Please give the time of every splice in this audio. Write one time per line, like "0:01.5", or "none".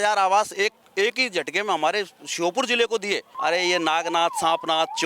0:03.3